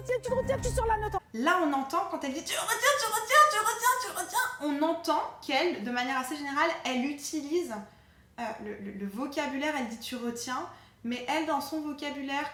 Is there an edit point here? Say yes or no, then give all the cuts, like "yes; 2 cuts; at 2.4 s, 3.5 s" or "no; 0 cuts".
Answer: no; 0 cuts